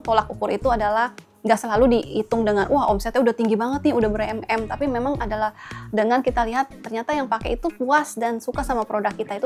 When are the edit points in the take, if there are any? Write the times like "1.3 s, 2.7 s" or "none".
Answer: none